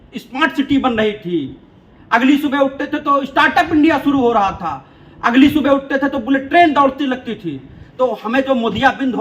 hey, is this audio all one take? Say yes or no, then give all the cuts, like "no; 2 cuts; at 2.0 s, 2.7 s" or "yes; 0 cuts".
yes; 0 cuts